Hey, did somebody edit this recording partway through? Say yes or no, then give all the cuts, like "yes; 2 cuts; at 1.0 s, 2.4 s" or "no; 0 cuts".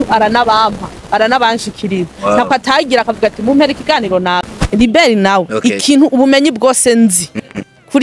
yes; 1 cut; at 4.5 s